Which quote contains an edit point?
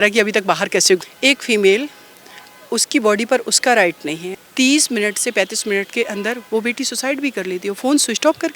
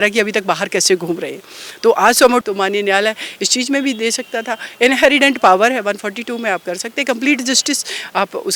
first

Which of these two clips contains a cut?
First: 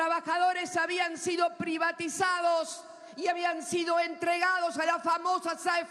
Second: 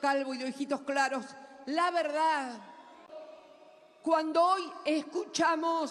second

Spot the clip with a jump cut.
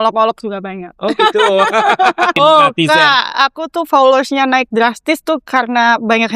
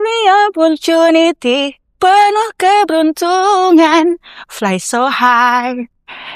first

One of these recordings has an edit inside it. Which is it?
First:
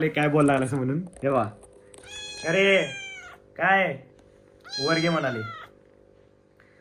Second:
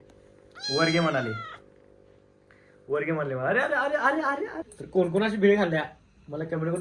second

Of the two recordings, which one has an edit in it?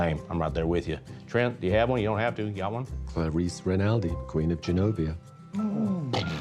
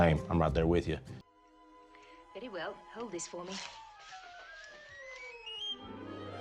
first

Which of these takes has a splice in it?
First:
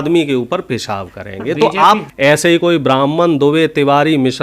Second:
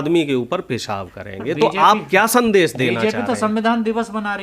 first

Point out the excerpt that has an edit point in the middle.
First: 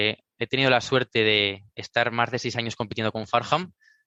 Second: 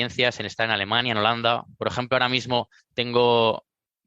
second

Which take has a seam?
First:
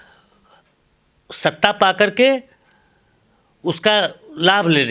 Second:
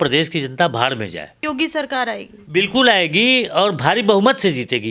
second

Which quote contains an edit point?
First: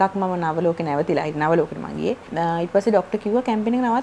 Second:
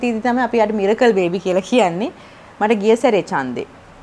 first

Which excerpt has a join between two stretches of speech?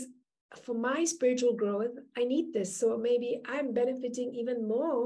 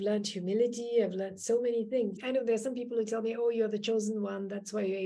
second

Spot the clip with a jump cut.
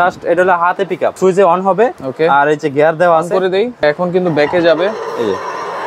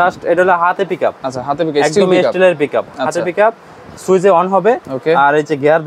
first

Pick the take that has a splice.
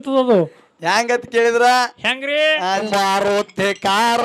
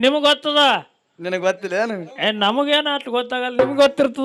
first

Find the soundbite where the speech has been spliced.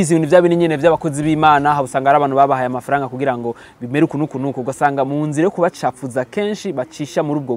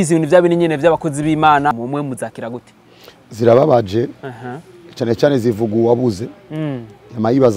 second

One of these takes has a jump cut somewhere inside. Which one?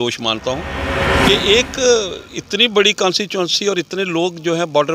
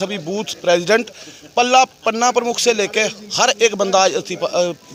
first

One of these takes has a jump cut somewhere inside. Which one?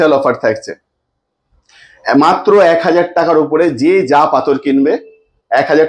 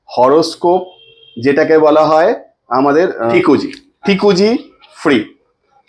second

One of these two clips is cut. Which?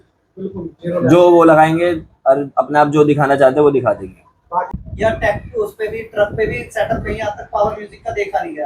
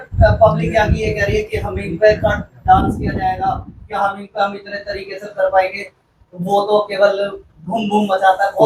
first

